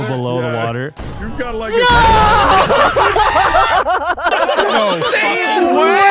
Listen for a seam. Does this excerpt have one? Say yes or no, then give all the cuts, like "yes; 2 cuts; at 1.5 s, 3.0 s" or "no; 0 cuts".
no; 0 cuts